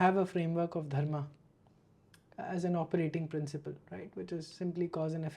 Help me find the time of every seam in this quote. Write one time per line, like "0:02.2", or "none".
none